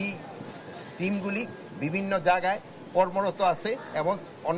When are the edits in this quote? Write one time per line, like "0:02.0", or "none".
none